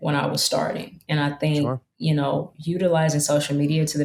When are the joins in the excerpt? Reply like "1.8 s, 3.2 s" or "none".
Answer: none